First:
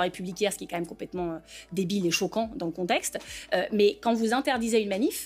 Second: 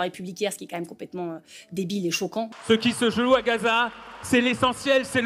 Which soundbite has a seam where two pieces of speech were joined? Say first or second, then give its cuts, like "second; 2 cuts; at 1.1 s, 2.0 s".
second; 1 cut; at 2.5 s